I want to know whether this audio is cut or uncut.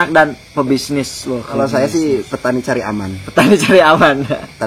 cut